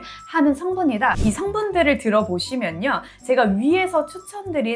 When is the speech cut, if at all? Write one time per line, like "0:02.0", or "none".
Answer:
0:01.2